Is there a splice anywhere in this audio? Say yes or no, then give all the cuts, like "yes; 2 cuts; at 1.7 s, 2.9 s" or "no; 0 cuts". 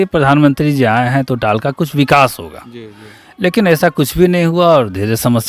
no; 0 cuts